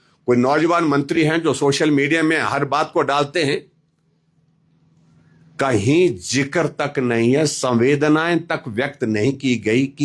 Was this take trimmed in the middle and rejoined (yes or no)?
no